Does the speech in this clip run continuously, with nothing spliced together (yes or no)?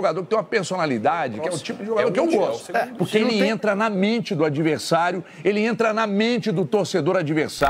yes